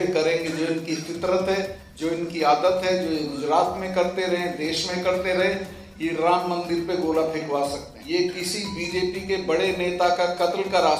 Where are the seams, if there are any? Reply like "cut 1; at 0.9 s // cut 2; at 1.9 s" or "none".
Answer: cut 1; at 1.8 s // cut 2; at 7.9 s